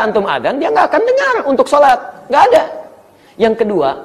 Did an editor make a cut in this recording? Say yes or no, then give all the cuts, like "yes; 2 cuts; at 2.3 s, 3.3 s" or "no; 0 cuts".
no; 0 cuts